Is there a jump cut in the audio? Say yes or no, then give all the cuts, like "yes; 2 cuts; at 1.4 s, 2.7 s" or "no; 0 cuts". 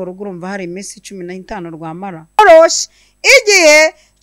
yes; 1 cut; at 2.4 s